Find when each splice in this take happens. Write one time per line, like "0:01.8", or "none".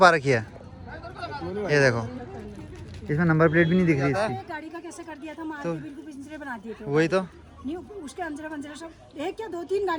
0:04.3